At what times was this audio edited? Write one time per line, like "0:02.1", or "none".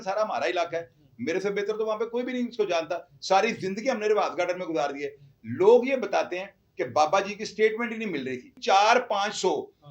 0:08.6